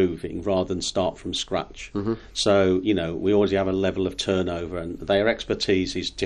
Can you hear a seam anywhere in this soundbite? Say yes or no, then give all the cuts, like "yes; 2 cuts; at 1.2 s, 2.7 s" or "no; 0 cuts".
no; 0 cuts